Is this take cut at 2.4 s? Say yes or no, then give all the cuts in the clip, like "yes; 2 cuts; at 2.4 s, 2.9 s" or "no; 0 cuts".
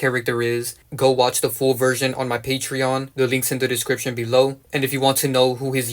no; 2 cuts; at 0.9 s, 4.6 s